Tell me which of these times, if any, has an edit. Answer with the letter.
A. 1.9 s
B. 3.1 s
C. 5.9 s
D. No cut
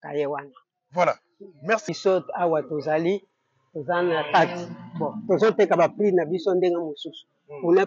A